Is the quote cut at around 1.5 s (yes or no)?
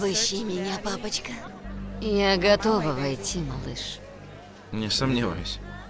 yes